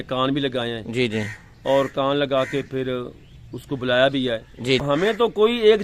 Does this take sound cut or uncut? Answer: cut